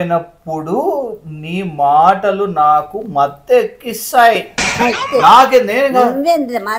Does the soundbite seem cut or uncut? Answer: uncut